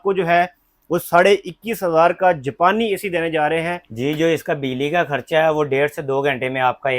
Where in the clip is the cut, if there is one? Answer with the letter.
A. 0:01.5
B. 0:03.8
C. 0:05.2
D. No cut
B